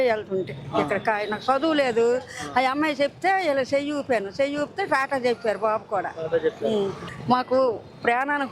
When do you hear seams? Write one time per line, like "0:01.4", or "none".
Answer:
0:07.0